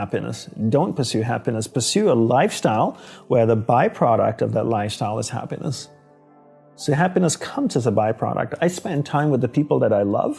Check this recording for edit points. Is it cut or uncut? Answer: uncut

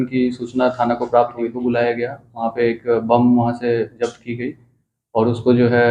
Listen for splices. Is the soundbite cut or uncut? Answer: cut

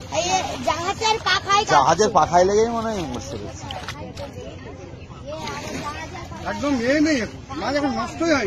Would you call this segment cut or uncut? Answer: uncut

